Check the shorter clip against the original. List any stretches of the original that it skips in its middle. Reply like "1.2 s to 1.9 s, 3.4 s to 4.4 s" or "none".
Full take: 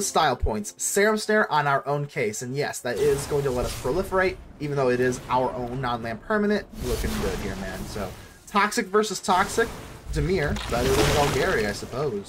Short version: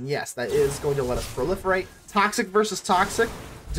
4.4 s to 8.4 s